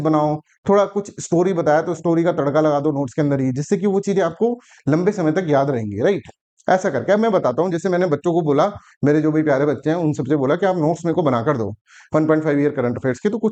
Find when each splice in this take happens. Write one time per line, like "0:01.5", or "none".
none